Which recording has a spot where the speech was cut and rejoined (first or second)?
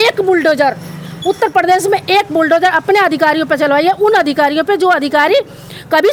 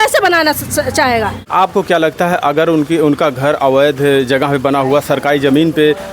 second